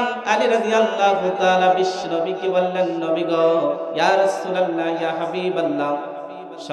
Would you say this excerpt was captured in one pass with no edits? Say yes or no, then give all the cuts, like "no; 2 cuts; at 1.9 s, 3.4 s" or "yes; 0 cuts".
yes; 0 cuts